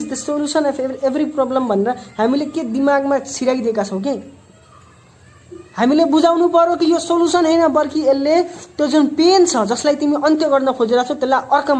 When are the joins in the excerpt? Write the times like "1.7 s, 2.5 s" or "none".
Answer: none